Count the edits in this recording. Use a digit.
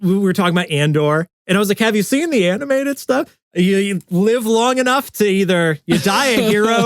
1